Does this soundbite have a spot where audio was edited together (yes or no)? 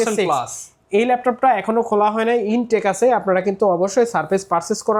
no